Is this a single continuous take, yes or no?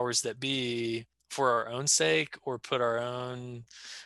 no